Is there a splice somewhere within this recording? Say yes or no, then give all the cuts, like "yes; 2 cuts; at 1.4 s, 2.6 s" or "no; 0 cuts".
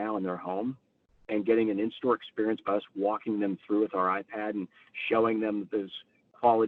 no; 0 cuts